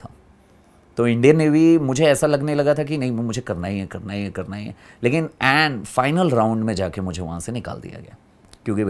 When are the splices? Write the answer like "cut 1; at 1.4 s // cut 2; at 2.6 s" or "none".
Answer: none